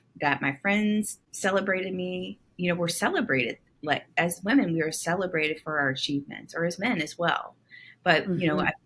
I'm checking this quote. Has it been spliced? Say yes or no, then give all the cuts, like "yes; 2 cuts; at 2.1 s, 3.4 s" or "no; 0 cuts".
yes; 1 cut; at 1.2 s